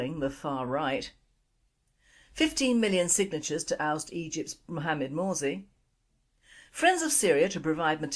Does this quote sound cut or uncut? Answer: cut